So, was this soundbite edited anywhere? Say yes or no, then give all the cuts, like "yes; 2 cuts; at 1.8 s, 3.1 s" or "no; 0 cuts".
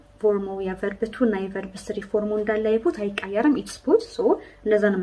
no; 0 cuts